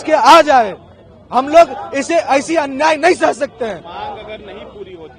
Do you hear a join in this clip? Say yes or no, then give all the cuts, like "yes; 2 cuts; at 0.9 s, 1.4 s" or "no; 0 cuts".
no; 0 cuts